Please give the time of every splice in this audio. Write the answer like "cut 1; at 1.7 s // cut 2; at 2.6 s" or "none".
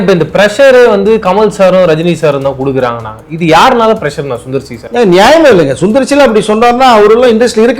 none